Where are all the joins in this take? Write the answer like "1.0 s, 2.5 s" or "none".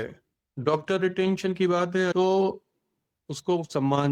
2.1 s